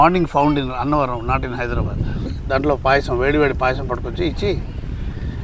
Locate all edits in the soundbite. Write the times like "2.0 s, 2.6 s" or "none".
2.3 s